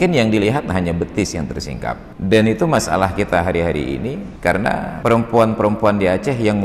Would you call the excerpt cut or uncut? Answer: cut